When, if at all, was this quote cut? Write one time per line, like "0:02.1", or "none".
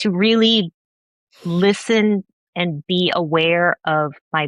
none